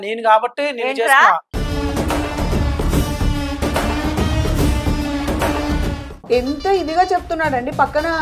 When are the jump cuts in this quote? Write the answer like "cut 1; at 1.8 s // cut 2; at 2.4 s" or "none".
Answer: cut 1; at 6.2 s